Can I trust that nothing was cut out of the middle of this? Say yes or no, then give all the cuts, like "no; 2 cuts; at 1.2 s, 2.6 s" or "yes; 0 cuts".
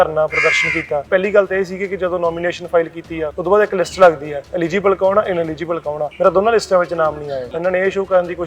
no; 4 cuts; at 1.0 s, 3.3 s, 6.1 s, 7.5 s